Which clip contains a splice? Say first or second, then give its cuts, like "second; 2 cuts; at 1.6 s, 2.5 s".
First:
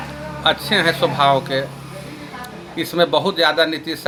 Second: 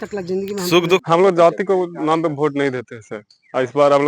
second; 1 cut; at 1.0 s